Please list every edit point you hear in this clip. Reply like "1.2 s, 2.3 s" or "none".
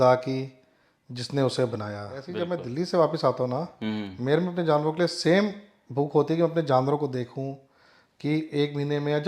2.3 s